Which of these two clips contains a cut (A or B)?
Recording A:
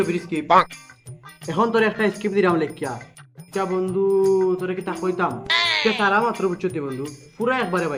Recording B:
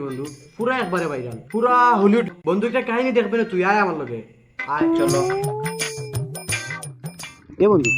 B